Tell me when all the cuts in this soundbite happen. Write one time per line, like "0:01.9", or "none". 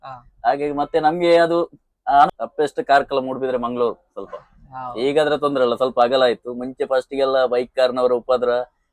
0:02.3